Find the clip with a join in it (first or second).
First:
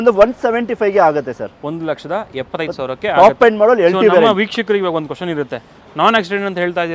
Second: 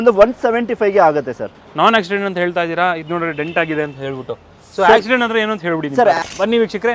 second